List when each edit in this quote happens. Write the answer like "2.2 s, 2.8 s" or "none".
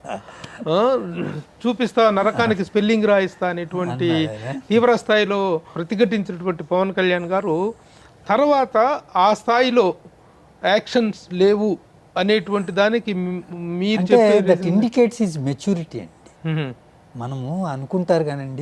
5.8 s